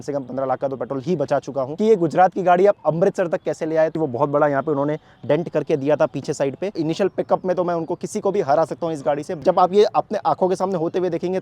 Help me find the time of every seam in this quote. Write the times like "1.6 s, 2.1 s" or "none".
1.7 s, 3.9 s, 6.7 s, 9.4 s